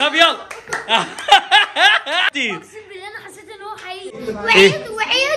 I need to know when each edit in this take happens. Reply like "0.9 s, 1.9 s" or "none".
2.3 s, 4.2 s

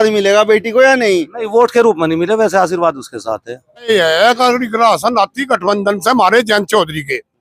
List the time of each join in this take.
3.9 s

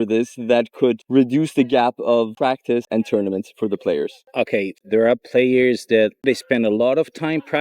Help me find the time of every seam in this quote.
1.0 s, 2.6 s, 4.8 s, 6.2 s

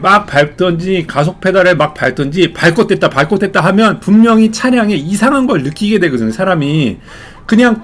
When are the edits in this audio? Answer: none

